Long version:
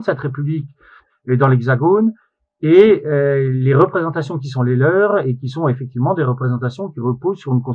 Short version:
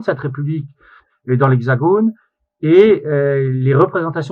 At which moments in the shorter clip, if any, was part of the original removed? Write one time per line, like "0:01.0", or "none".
none